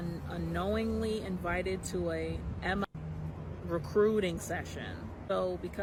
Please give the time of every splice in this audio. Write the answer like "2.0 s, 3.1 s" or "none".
none